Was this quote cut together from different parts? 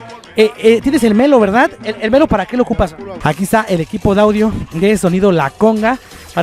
yes; 1 cut; at 3.2 s

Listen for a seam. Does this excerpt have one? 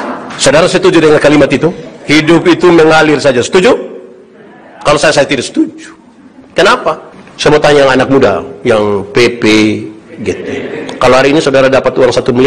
yes; 1 cut; at 7.1 s

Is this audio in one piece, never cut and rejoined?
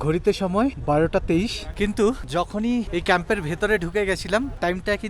yes; 0 cuts

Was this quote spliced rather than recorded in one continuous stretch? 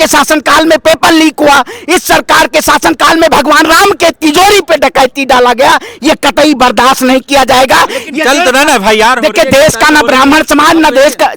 no; 0 cuts

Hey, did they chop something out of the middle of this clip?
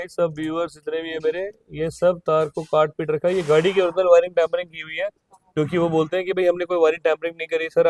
no; 0 cuts

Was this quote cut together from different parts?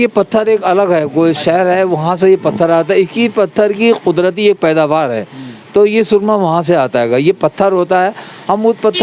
no; 0 cuts

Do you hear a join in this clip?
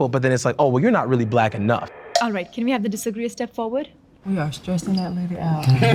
no; 0 cuts

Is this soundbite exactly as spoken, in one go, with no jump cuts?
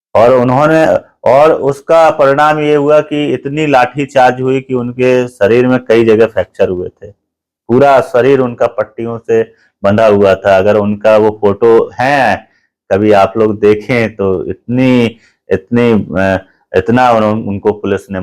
yes; 0 cuts

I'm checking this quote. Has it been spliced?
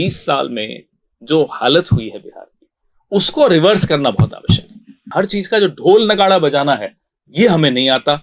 yes; 1 cut; at 5.1 s

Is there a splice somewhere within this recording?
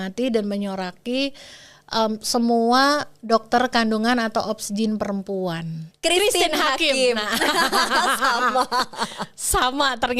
yes; 1 cut; at 5.8 s

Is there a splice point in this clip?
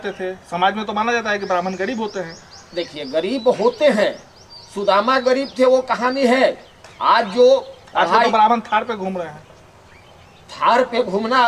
no; 0 cuts

